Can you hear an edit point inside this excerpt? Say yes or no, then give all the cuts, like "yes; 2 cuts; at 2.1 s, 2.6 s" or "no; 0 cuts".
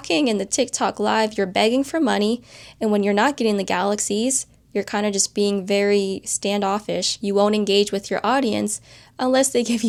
no; 0 cuts